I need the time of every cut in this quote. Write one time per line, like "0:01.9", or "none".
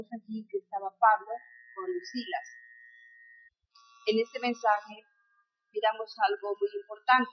none